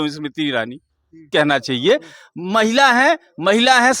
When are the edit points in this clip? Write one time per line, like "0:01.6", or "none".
0:01.3

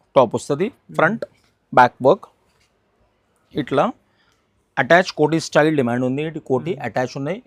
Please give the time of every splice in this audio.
none

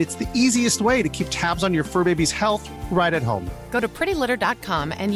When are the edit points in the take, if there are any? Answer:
none

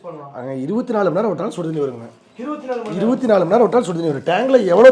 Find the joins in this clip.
none

